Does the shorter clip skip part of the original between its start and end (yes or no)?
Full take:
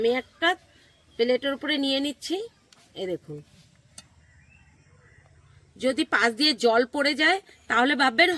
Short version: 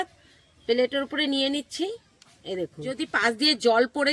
yes